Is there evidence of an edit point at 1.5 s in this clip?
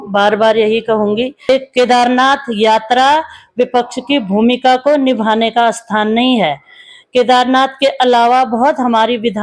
yes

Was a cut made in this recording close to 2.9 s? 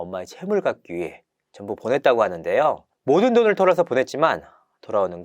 yes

